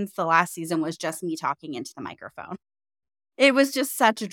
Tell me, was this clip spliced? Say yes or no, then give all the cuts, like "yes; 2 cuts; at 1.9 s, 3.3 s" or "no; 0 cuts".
no; 0 cuts